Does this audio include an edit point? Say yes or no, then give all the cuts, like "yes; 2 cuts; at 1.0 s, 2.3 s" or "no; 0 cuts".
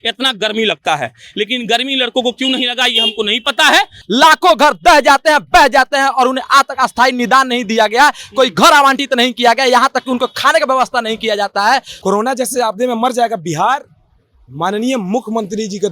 yes; 2 cuts; at 4.0 s, 11.9 s